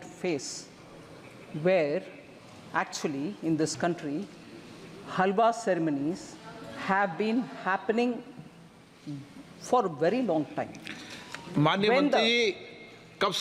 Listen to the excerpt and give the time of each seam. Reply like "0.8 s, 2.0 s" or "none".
none